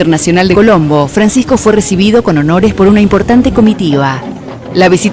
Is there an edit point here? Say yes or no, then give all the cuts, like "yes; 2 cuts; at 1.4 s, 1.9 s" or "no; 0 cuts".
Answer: yes; 1 cut; at 1.1 s